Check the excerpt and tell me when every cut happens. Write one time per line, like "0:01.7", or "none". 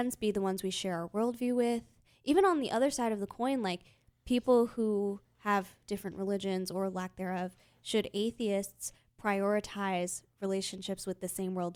none